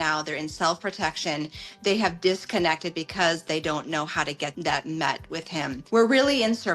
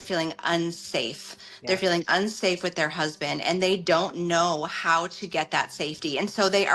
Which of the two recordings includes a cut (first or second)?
first